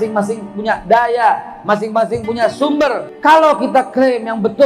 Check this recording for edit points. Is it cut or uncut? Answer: cut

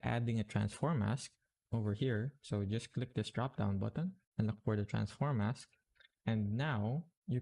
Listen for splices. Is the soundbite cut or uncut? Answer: uncut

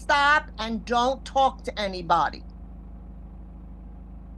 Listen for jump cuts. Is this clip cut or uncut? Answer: uncut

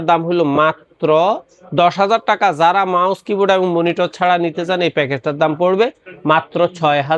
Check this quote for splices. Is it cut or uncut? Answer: uncut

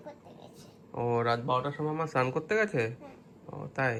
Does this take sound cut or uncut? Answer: uncut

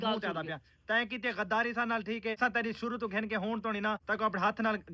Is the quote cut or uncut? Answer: uncut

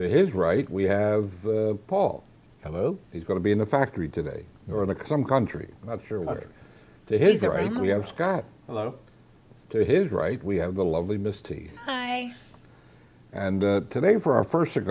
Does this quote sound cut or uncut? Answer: uncut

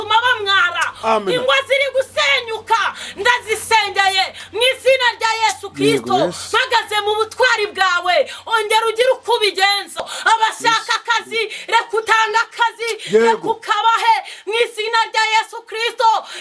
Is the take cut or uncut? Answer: cut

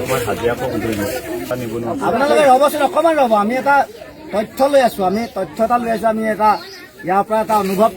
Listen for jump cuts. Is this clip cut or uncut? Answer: cut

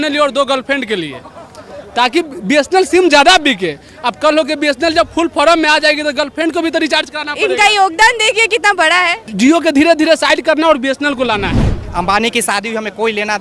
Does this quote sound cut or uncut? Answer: cut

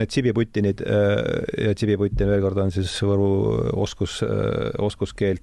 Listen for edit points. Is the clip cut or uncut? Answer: uncut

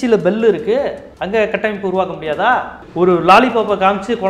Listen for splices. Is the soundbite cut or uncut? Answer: cut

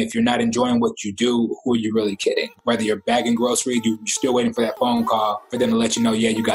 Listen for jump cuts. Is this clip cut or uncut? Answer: cut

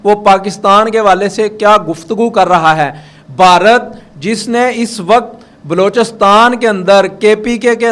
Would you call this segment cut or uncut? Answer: uncut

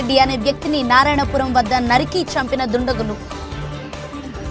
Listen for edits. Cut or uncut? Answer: cut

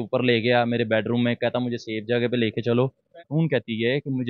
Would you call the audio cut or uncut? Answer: cut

